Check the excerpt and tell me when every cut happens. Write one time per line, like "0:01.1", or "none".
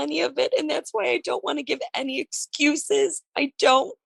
none